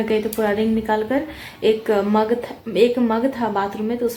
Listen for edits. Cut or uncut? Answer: uncut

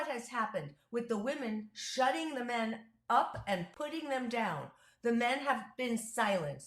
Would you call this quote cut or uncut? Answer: cut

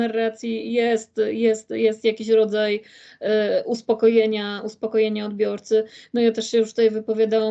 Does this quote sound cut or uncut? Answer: uncut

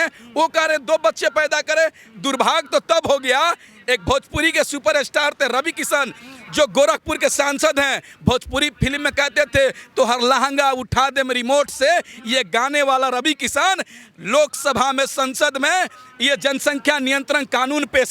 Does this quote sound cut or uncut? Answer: uncut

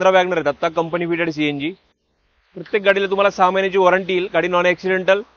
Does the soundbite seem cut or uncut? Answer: uncut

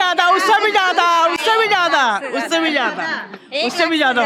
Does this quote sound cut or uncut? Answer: uncut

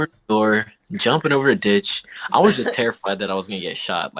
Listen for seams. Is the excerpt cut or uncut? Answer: uncut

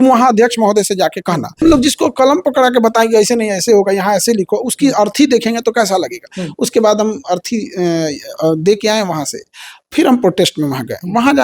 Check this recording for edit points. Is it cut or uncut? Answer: cut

